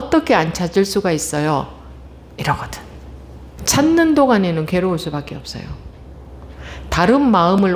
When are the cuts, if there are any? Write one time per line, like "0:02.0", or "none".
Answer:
0:03.6